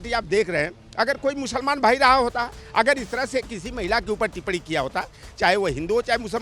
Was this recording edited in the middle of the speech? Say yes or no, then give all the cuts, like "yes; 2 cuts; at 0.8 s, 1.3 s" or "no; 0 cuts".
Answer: no; 0 cuts